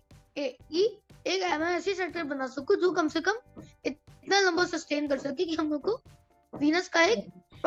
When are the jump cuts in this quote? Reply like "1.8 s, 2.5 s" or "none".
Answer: none